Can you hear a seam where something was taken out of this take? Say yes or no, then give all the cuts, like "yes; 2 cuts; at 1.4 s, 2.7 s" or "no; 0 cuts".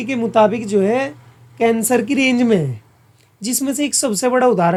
no; 0 cuts